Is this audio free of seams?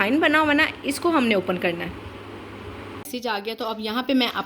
no; 1 cut; at 3.1 s

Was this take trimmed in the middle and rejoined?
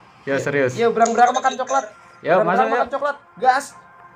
no; 0 cuts

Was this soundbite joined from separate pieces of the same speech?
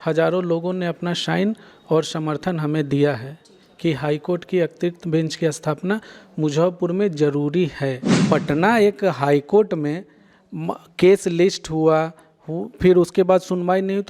yes; 1 cut; at 8.1 s

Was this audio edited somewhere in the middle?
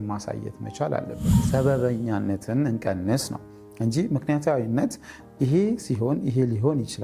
yes; 1 cut; at 1.3 s

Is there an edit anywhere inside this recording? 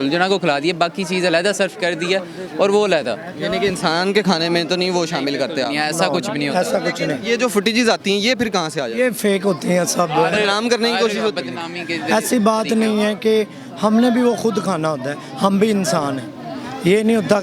no; 0 cuts

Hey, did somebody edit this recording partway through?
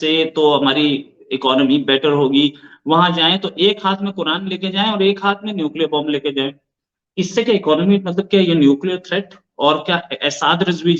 yes; 1 cut; at 6.9 s

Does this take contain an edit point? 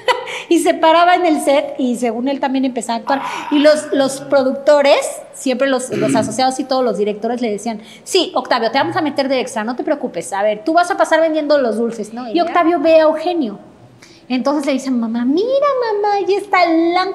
yes; 1 cut; at 12.1 s

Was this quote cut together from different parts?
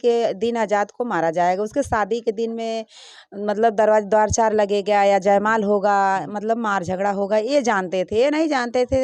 no; 0 cuts

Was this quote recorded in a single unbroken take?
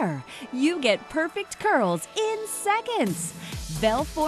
yes; 0 cuts

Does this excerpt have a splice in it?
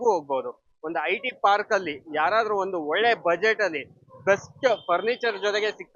no; 0 cuts

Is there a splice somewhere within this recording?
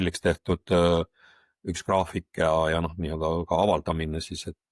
no; 0 cuts

